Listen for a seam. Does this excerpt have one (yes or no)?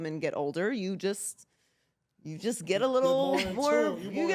no